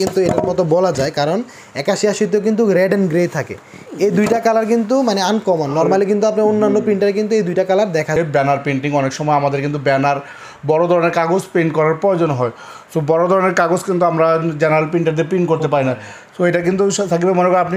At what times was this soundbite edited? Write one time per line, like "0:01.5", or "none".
0:08.1

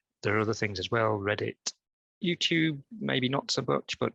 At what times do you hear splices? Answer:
none

